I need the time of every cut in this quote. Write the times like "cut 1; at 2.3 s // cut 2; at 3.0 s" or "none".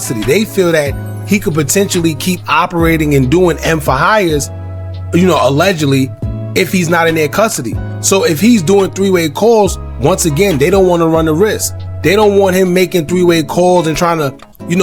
none